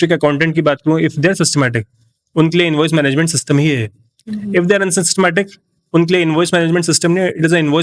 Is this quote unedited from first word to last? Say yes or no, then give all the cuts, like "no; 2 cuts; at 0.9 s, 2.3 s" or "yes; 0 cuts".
yes; 0 cuts